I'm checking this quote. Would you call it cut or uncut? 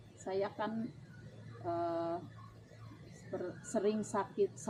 uncut